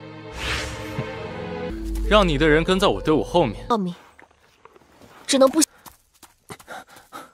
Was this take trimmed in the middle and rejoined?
yes; 1 cut; at 3.7 s

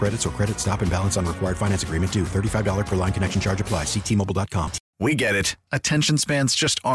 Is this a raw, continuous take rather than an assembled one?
no; 1 cut; at 4.8 s

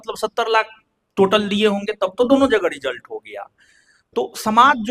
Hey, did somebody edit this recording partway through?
no; 0 cuts

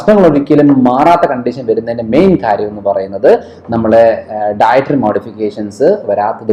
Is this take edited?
no; 0 cuts

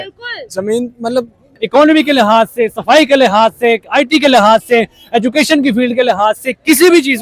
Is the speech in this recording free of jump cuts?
no; 1 cut; at 1.5 s

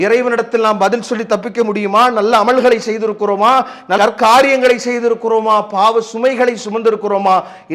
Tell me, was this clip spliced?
no; 0 cuts

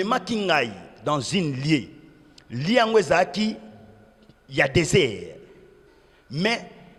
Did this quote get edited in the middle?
no; 0 cuts

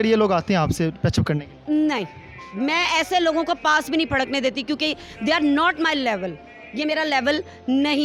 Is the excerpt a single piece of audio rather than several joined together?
yes; 0 cuts

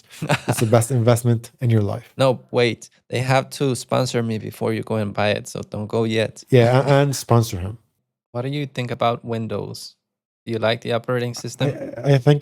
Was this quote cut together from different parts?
yes; 1 cut; at 8.0 s

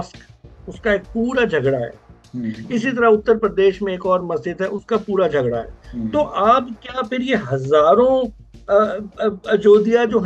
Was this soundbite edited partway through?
no; 0 cuts

